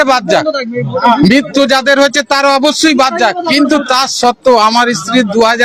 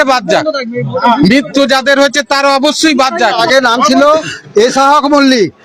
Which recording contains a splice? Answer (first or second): second